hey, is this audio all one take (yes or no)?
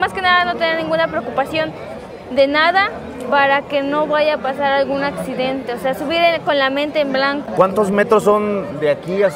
yes